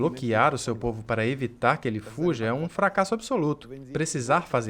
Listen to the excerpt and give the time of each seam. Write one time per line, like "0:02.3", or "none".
0:03.7